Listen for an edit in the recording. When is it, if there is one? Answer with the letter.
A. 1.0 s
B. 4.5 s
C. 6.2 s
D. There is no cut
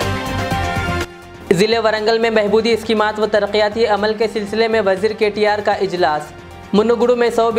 A